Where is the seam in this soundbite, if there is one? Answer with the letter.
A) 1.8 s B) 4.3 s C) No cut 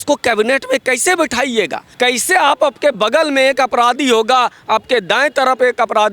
A